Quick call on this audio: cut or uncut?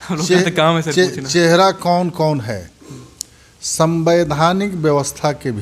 uncut